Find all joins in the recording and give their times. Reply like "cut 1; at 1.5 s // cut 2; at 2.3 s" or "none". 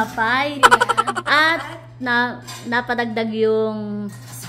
none

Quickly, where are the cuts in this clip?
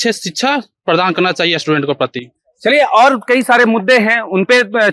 none

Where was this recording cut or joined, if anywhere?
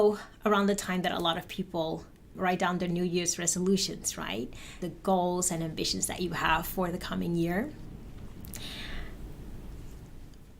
cut 1; at 2.3 s

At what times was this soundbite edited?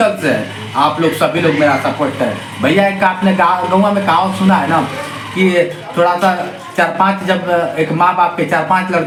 none

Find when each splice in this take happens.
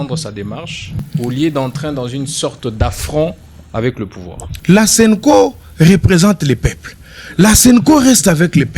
cut 1; at 1.1 s // cut 2; at 4.5 s

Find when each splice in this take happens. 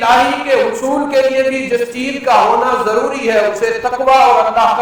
none

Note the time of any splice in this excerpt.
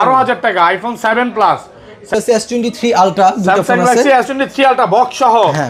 cut 1; at 2.1 s

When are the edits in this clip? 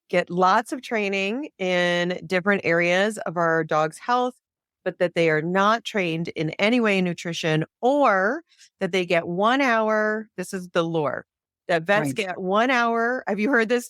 none

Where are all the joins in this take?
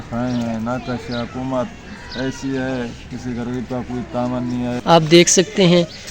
cut 1; at 4.7 s

